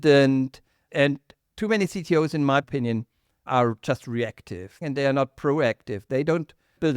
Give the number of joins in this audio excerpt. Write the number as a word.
two